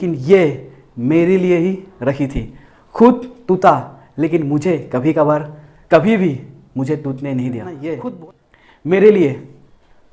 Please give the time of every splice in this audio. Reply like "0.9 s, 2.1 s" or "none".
8.0 s